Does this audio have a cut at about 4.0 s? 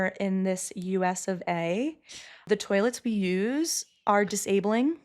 no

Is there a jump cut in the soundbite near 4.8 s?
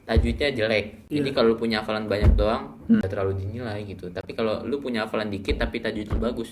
no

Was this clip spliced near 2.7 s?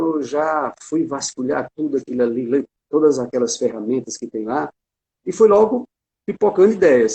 yes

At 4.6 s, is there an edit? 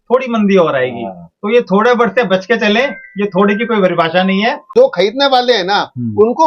yes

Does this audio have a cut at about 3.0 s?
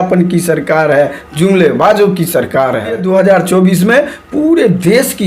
yes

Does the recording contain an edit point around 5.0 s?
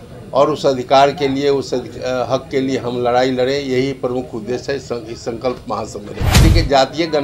no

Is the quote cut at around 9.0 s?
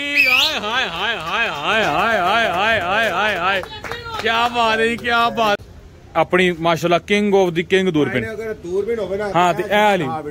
no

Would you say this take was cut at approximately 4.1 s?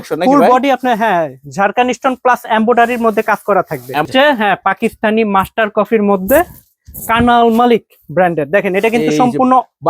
yes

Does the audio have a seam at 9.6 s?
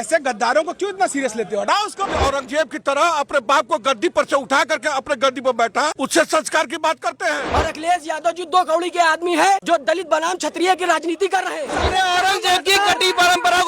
yes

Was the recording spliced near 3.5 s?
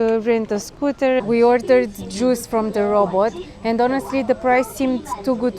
no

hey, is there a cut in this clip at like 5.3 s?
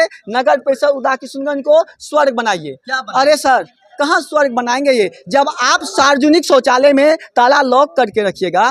no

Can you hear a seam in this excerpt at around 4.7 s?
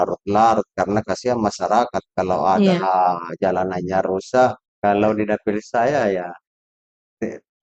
yes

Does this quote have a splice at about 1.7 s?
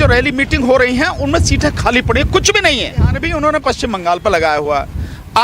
no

